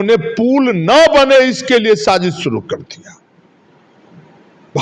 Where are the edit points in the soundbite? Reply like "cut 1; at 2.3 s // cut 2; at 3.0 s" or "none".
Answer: cut 1; at 3.3 s